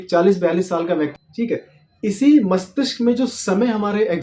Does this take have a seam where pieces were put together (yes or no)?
yes